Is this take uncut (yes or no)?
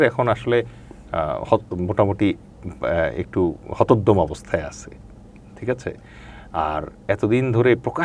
yes